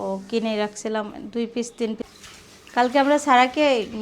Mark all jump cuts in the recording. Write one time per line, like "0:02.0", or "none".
0:02.1